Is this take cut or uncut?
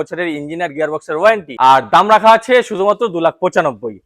cut